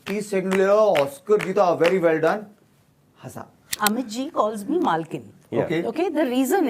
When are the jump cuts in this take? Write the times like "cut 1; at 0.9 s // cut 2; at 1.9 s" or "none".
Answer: cut 1; at 3.8 s

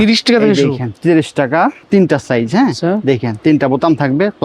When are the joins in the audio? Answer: cut 1; at 1.8 s

